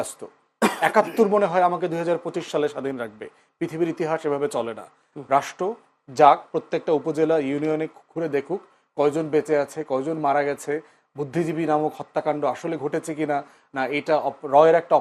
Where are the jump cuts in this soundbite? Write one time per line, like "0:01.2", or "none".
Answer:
0:05.1